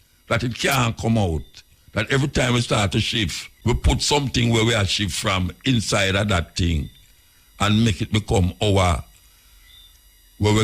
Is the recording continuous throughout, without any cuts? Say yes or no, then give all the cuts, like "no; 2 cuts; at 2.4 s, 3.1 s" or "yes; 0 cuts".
no; 1 cut; at 3.5 s